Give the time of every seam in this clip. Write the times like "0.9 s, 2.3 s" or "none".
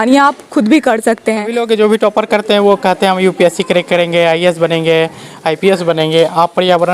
1.5 s